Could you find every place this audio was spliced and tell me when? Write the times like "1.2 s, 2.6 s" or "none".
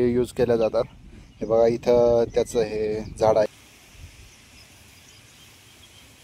3.5 s